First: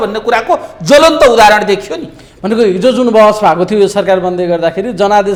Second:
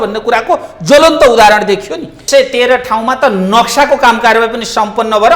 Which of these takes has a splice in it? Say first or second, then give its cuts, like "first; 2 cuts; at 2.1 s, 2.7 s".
second; 1 cut; at 2.2 s